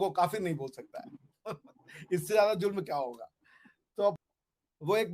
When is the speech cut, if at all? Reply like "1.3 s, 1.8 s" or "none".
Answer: 4.2 s